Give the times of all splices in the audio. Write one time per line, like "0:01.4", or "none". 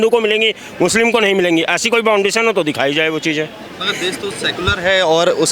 none